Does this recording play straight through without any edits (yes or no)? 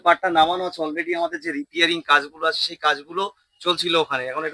yes